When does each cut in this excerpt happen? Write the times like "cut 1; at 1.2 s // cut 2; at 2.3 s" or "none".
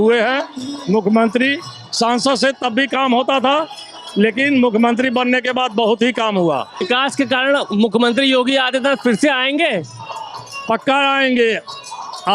cut 1; at 6.8 s